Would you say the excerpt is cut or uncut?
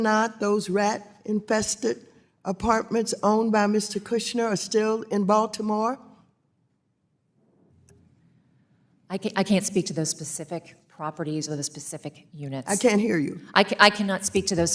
uncut